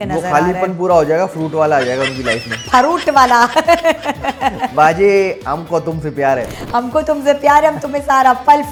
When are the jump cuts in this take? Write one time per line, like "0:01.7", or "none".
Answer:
none